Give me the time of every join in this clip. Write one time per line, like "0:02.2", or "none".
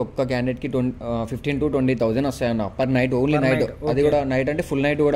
none